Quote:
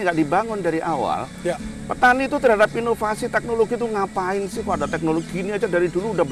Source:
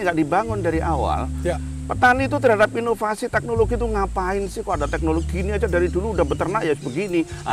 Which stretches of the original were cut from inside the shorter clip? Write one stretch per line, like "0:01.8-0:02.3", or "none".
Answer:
none